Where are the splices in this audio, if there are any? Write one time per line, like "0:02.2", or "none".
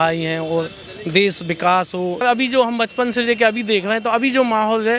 0:02.2